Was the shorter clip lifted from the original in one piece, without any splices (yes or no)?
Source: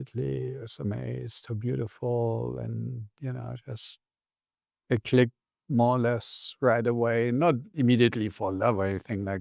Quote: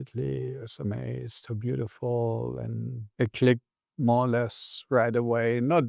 no